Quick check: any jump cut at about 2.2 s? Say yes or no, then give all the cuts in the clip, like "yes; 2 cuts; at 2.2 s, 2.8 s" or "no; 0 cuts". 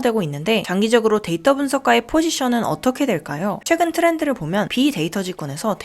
no; 1 cut; at 3.6 s